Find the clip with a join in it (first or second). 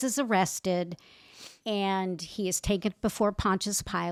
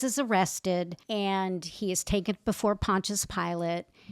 second